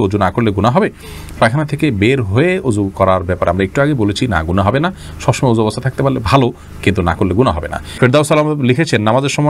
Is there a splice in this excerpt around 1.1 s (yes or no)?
no